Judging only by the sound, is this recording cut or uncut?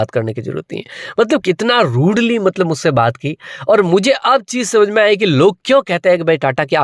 uncut